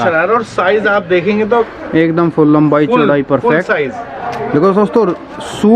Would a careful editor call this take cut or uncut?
uncut